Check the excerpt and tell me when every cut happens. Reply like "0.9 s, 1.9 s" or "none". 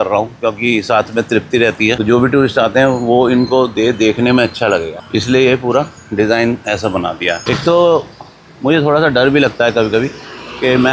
2.0 s, 7.4 s